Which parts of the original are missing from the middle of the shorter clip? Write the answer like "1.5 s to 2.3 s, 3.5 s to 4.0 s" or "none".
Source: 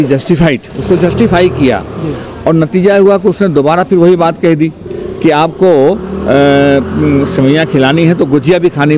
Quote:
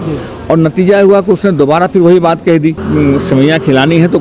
4.8 s to 6.9 s